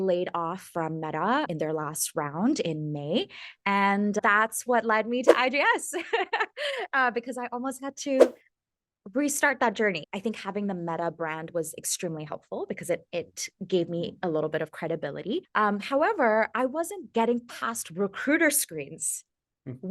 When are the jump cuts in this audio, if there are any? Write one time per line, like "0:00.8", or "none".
0:01.5
0:04.2
0:10.0
0:15.5